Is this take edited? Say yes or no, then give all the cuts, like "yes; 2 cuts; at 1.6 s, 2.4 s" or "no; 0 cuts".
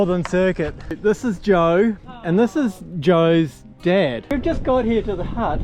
yes; 2 cuts; at 1.0 s, 4.3 s